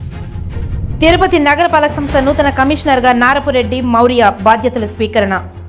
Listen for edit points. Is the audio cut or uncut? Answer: uncut